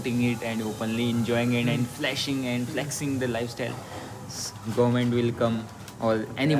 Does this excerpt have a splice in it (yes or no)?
no